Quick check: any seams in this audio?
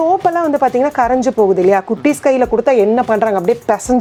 no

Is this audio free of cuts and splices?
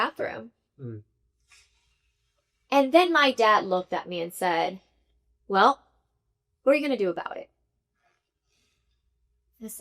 yes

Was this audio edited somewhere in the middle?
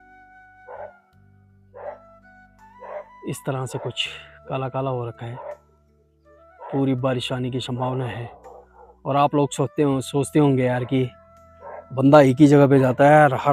no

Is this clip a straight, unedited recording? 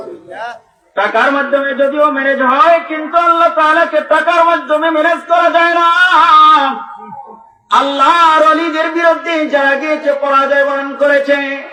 yes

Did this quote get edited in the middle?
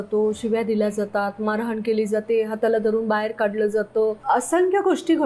yes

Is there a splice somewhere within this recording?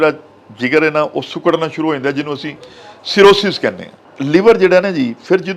yes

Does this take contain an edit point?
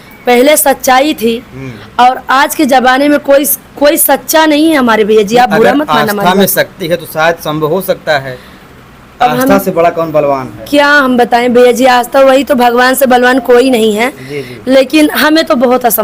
no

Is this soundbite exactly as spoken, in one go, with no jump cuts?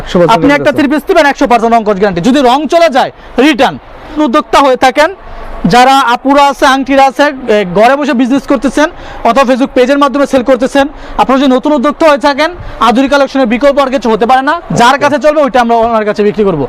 no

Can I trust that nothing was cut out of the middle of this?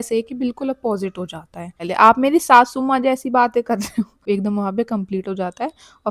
no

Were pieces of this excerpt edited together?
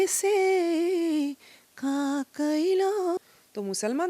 yes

